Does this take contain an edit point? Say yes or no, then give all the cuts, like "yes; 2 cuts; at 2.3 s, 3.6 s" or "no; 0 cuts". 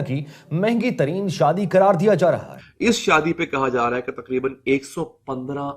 yes; 1 cut; at 2.5 s